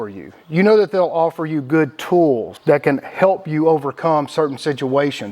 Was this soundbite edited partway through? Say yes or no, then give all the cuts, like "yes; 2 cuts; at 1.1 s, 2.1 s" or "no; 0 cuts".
yes; 1 cut; at 2.5 s